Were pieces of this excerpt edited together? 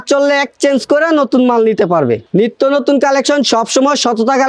yes; 1 cut; at 2.2 s

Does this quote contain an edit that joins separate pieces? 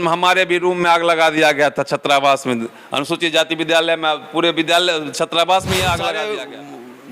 yes; 1 cut; at 6.2 s

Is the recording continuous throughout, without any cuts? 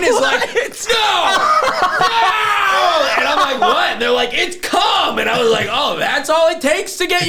yes; 0 cuts

